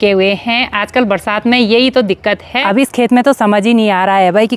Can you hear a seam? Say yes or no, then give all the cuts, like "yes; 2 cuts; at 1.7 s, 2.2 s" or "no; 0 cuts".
yes; 1 cut; at 2.5 s